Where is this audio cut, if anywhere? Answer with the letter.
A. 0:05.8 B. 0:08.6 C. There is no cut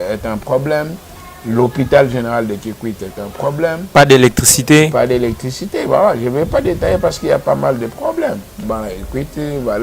B